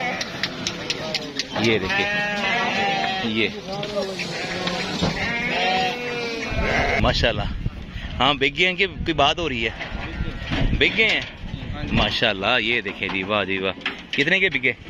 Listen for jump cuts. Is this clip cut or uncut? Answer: cut